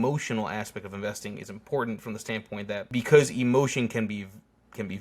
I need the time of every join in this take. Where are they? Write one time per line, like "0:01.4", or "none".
0:02.9